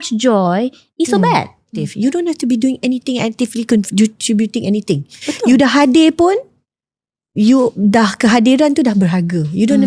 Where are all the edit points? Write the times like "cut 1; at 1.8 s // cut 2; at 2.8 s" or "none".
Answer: cut 1; at 1.8 s